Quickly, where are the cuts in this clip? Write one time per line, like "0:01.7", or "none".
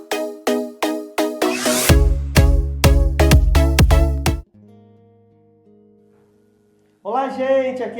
0:04.5